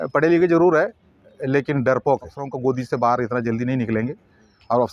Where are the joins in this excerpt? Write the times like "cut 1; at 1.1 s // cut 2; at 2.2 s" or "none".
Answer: cut 1; at 2.5 s